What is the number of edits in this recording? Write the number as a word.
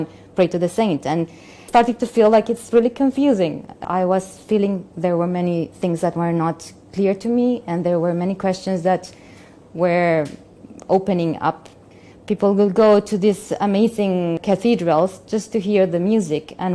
four